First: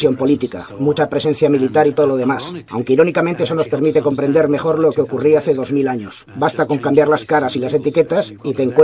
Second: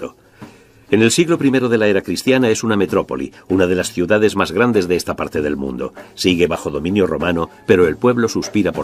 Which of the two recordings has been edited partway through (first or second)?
first